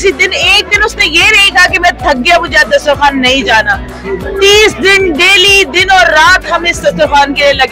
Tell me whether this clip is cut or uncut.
uncut